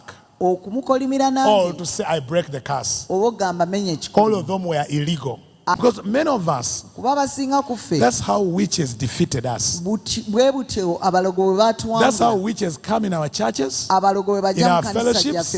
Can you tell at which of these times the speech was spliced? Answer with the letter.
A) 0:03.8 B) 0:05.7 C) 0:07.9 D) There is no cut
B